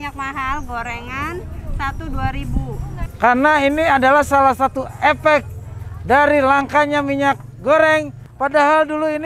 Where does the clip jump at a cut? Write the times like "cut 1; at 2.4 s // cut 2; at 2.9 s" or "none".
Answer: cut 1; at 3.0 s // cut 2; at 8.2 s